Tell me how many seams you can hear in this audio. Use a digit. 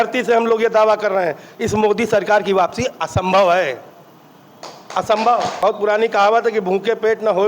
1